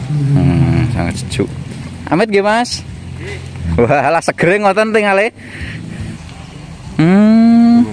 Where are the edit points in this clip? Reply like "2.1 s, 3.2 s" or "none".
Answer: 6.2 s